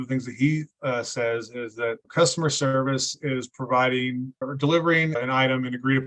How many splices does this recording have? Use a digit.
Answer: 3